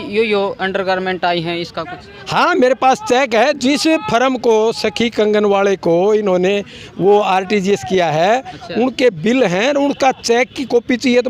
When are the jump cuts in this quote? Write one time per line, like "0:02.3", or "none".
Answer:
none